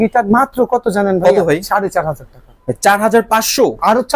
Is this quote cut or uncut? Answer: uncut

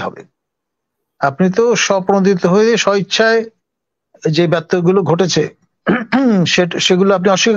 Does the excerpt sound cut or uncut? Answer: uncut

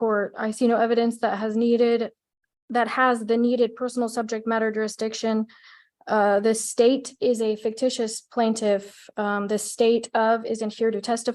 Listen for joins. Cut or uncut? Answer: uncut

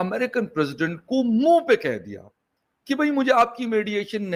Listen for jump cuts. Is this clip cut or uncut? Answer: uncut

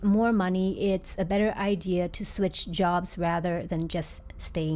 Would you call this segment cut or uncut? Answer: uncut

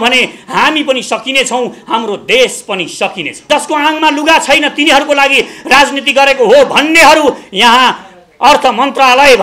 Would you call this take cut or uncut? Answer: cut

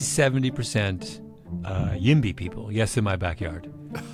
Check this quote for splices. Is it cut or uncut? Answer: uncut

